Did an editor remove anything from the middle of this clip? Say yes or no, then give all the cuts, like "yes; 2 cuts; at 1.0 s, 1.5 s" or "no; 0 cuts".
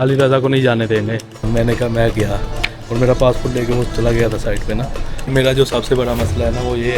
yes; 2 cuts; at 1.4 s, 5.2 s